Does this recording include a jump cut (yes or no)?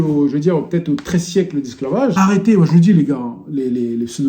yes